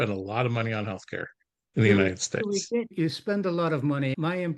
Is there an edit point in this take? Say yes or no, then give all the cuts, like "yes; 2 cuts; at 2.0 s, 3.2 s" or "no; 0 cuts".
no; 0 cuts